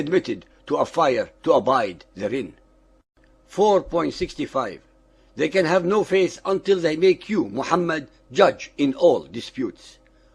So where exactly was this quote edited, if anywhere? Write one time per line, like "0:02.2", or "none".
0:04.5